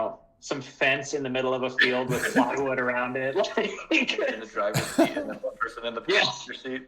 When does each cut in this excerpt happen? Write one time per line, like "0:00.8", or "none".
0:04.4